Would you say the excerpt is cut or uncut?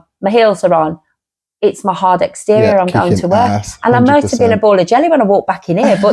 uncut